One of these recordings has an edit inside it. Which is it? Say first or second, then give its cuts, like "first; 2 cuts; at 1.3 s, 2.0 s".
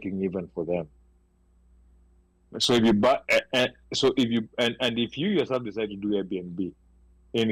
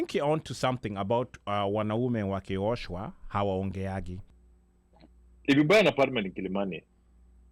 second; 1 cut; at 4.2 s